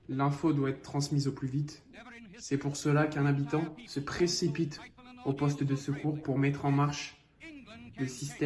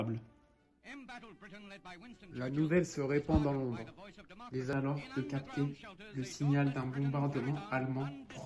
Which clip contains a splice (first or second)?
second